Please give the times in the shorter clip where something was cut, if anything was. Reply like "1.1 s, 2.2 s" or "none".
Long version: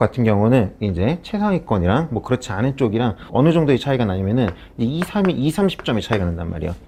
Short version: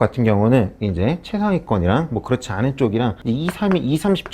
3.2 s